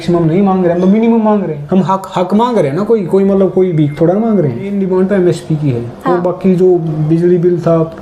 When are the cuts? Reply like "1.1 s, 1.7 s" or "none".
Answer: 1.6 s, 4.7 s

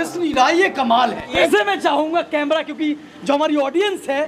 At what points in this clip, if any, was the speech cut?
1.4 s

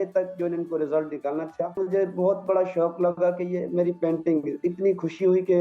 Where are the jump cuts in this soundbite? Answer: 1.8 s

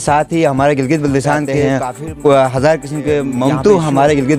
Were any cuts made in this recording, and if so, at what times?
1.6 s, 3.4 s

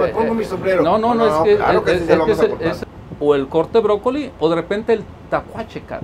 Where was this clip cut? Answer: 2.8 s

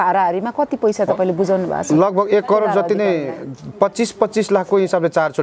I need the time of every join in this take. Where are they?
none

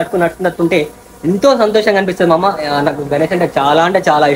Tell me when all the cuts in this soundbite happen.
none

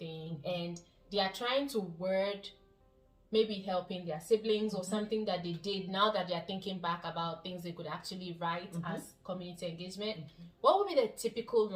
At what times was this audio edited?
none

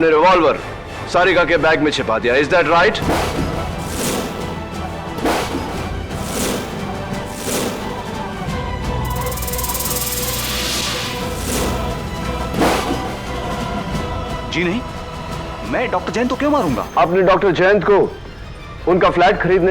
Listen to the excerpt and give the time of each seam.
12.1 s

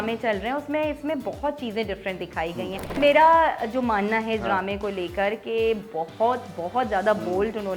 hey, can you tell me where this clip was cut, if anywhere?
3.0 s

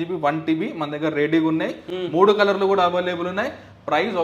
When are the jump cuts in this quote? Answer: none

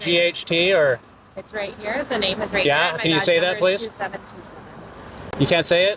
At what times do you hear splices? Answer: none

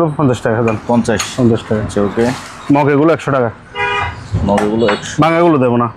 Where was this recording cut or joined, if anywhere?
none

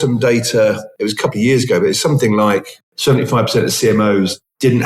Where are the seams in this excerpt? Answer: 0.9 s, 2.8 s

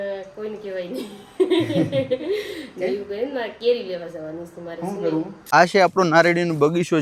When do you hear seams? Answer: 5.5 s

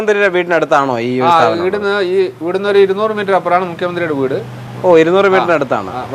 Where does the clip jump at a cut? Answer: none

